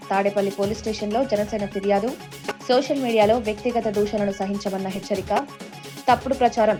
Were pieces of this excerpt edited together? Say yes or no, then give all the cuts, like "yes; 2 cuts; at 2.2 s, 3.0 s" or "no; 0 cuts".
no; 0 cuts